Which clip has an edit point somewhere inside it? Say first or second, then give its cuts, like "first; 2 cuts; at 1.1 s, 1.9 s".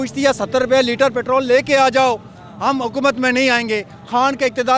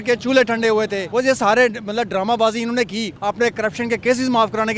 second; 2 cuts; at 1.0 s, 3.1 s